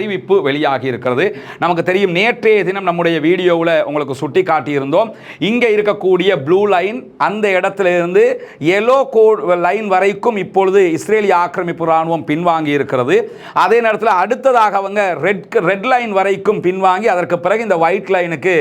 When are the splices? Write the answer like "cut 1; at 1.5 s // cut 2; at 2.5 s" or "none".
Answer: none